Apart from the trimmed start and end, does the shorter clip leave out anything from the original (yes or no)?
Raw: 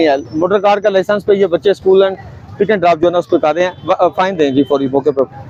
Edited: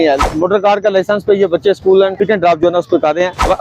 yes